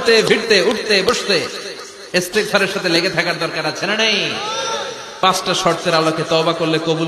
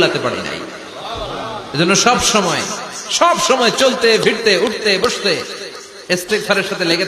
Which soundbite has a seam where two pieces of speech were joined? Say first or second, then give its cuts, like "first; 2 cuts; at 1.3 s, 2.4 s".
first; 1 cut; at 5.2 s